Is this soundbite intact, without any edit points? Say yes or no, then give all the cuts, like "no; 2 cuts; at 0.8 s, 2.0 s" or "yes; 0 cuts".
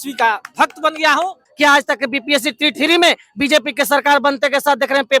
no; 1 cut; at 1.5 s